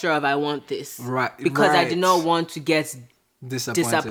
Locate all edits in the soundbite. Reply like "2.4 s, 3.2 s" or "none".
none